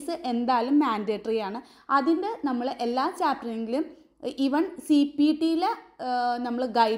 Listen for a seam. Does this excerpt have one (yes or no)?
no